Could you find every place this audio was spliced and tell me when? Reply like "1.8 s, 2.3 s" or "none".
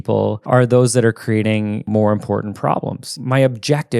1.8 s, 3.2 s